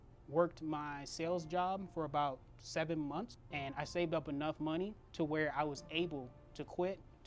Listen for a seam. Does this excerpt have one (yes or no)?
yes